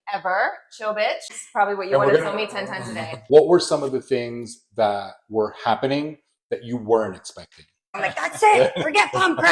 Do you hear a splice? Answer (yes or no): yes